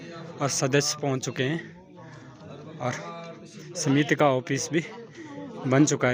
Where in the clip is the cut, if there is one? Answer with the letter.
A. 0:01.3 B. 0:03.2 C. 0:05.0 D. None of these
D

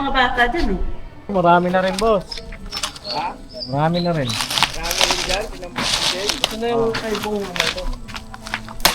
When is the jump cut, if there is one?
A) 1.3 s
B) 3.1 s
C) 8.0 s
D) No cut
A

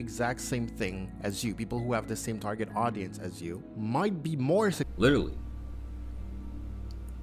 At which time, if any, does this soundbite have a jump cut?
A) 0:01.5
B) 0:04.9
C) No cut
B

